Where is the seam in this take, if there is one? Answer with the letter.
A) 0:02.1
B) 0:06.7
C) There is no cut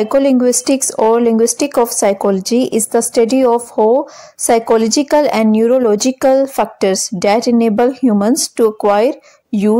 C